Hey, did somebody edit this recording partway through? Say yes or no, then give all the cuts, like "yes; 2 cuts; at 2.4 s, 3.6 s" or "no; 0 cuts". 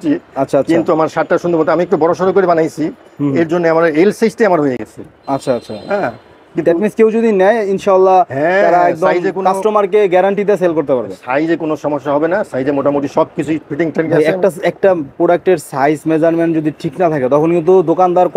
no; 0 cuts